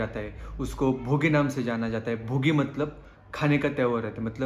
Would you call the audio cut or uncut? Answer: uncut